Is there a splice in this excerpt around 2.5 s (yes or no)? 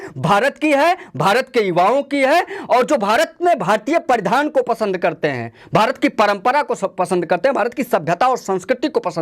no